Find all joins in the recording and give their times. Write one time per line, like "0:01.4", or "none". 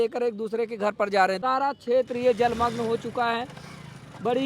0:01.4